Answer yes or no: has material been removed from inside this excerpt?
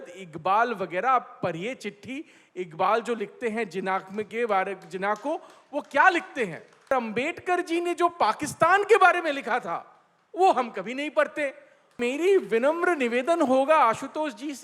yes